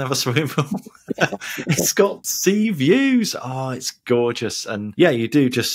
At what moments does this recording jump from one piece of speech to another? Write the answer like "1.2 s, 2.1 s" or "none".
2.3 s, 4.8 s